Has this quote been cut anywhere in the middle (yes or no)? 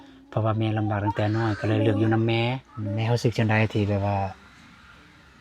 yes